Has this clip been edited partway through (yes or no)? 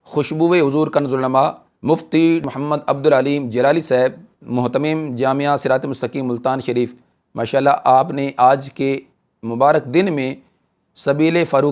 no